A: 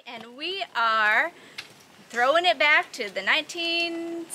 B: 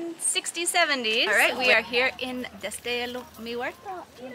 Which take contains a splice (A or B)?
B